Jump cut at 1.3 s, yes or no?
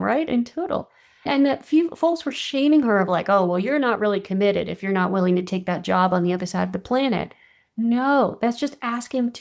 yes